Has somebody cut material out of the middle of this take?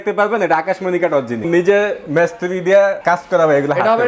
yes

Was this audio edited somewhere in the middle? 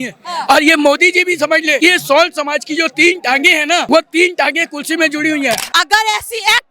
yes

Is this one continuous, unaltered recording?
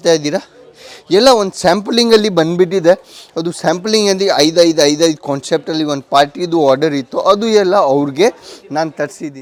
yes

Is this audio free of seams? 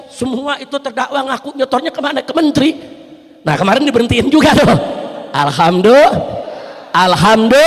yes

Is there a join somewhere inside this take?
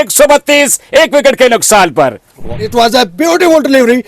yes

